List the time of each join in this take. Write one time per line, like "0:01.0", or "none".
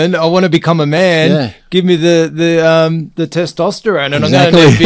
none